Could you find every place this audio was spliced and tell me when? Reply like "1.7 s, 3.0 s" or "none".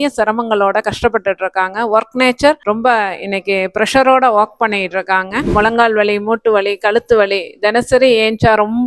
5.5 s